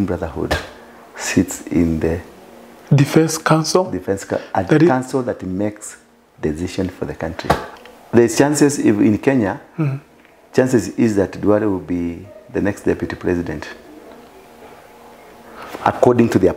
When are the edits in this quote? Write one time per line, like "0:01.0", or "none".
0:07.7